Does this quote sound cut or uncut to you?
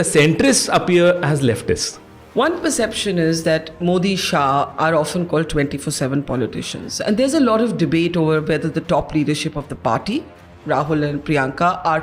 cut